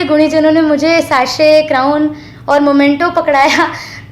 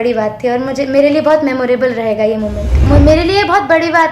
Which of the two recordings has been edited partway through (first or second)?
second